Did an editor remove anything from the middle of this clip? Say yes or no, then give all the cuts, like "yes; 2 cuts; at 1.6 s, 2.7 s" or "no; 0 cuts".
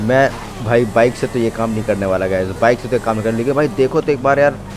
no; 0 cuts